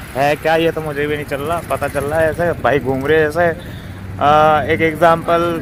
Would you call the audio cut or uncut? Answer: uncut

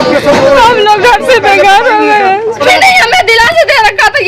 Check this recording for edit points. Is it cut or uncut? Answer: cut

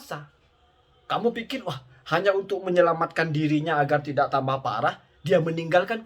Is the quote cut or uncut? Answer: uncut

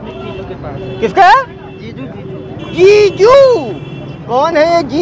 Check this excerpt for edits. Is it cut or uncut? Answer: uncut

